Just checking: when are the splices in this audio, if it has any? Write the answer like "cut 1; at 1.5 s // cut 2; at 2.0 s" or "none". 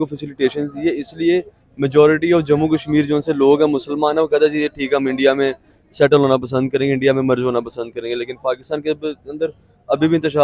none